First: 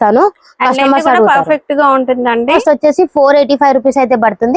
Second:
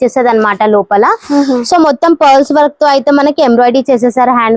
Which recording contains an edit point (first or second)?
first